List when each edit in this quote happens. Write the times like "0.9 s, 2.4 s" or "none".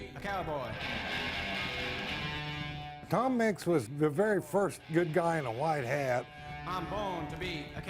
2.9 s, 3.9 s, 6.4 s